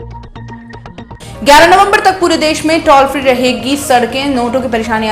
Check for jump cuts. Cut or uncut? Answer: cut